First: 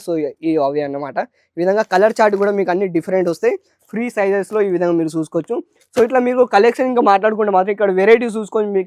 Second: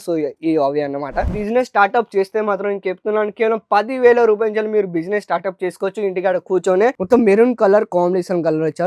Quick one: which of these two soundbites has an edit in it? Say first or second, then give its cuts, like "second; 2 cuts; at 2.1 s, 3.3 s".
second; 2 cuts; at 1.4 s, 7.0 s